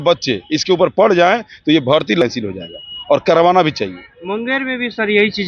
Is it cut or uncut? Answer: cut